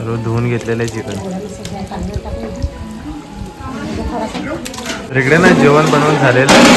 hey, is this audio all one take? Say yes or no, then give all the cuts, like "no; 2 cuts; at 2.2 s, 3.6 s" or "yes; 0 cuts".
no; 1 cut; at 5.0 s